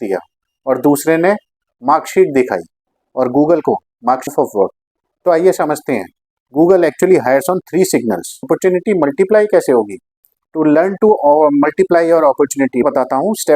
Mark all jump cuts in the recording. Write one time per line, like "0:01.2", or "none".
0:04.3
0:08.5
0:12.8